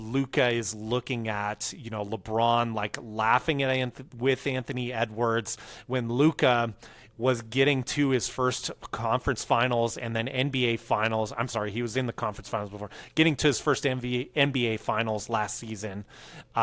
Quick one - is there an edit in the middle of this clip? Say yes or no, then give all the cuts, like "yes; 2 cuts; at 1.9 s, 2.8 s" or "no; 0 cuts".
no; 0 cuts